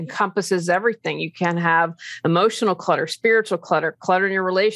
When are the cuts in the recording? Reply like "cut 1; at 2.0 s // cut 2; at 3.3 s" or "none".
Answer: none